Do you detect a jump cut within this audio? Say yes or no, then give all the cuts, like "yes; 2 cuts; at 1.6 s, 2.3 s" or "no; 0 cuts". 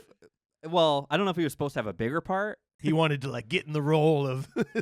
yes; 1 cut; at 2.8 s